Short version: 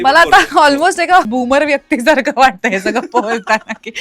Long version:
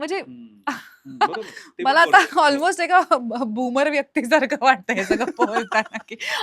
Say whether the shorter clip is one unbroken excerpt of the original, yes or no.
no